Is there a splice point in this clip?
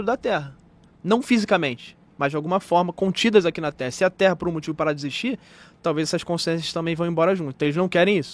no; 0 cuts

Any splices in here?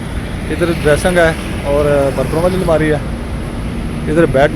no; 0 cuts

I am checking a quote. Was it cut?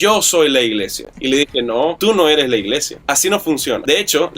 yes; 1 cut; at 1.0 s

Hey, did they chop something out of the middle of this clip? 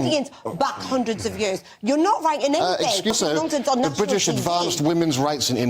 yes; 1 cut; at 3.1 s

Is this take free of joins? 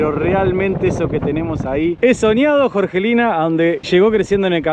no; 1 cut; at 3.8 s

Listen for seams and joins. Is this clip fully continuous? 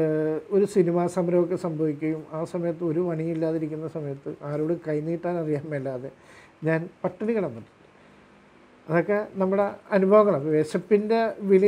yes; 0 cuts

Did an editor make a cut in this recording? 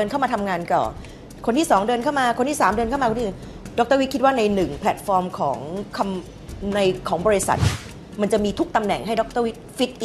no; 0 cuts

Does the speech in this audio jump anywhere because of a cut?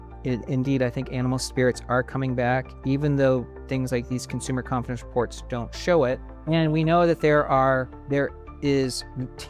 yes; 2 cuts; at 6.3 s, 8.0 s

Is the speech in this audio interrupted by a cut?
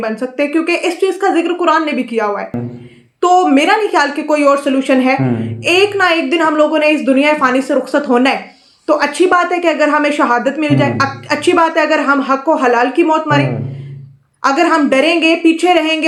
no; 0 cuts

